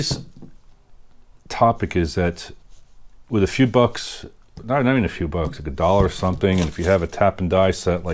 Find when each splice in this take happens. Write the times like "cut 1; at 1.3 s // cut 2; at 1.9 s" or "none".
none